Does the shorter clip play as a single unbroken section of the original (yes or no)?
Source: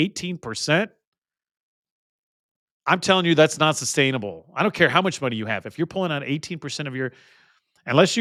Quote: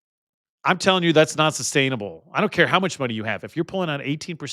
yes